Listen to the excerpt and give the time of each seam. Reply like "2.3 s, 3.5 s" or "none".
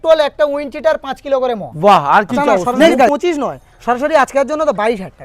3.1 s